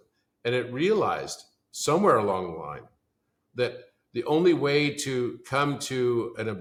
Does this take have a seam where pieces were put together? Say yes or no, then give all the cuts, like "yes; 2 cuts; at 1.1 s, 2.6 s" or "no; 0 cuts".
no; 0 cuts